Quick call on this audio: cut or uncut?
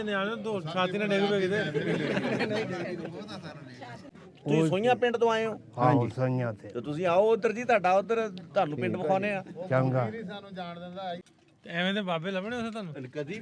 cut